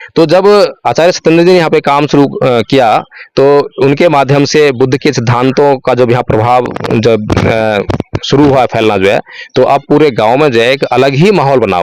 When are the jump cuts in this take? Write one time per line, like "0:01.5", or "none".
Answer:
none